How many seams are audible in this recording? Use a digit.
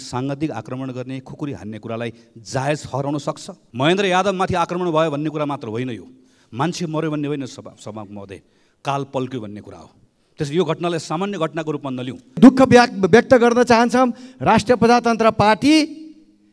2